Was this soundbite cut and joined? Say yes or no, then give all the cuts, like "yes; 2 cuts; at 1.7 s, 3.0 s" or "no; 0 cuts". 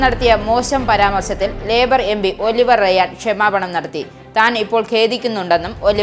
no; 0 cuts